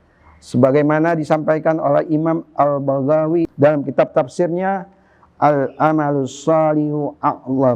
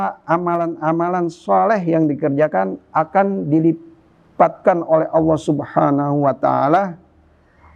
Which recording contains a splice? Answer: first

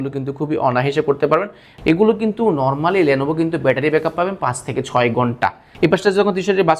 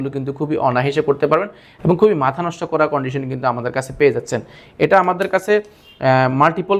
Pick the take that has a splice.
first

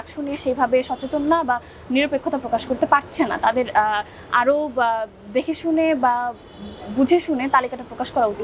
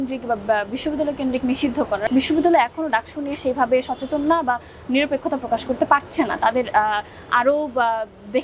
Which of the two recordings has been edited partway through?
second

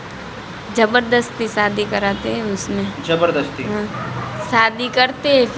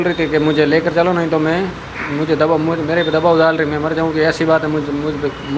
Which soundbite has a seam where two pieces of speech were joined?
first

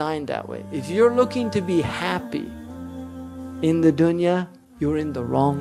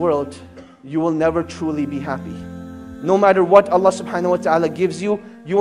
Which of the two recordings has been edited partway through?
first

